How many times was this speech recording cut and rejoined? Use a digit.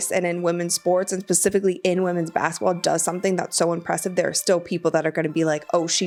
0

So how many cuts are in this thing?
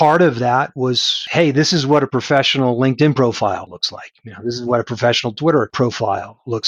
3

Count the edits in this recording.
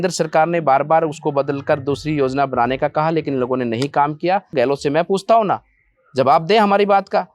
1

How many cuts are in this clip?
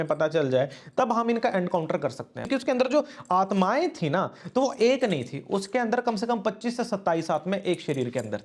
1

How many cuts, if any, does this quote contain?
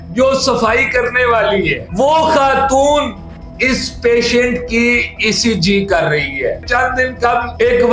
1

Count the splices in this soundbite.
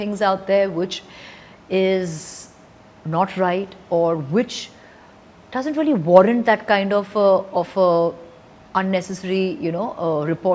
0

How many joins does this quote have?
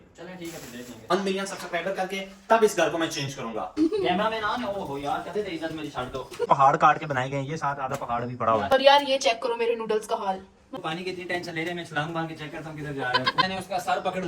6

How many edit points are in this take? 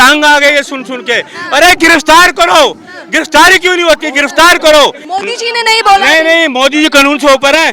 1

